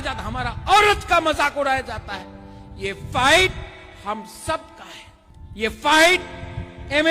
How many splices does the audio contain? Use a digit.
0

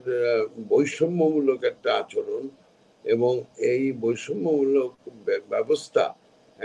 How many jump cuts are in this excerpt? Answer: 0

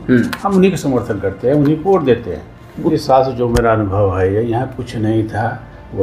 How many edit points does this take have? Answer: 1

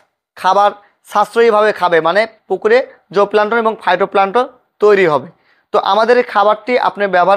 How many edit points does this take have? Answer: 0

